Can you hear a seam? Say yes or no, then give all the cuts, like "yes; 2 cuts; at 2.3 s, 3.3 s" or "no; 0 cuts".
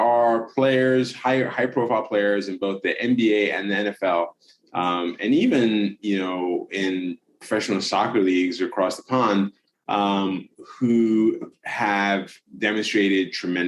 no; 0 cuts